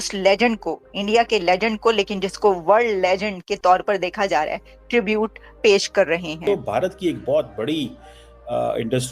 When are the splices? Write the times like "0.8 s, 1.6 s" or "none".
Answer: 6.3 s